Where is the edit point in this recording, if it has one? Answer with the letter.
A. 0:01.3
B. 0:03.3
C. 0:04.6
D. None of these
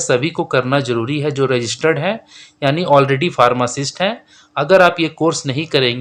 D